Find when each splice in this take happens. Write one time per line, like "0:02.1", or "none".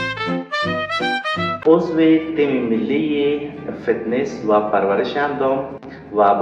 0:01.6